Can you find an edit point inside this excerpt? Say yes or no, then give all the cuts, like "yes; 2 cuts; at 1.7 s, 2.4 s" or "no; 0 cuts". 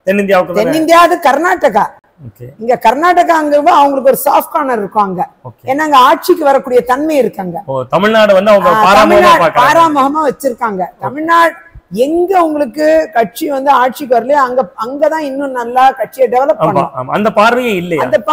no; 0 cuts